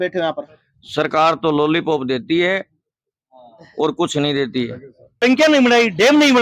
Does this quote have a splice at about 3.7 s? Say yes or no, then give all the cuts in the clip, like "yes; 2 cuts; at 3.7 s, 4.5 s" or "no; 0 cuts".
no; 1 cut; at 5.2 s